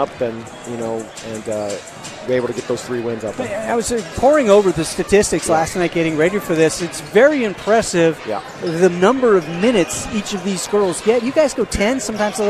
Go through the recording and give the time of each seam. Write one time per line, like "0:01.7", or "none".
0:01.0